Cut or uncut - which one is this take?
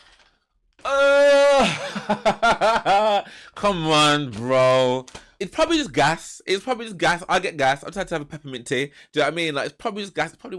uncut